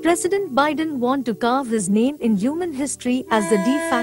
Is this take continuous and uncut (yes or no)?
no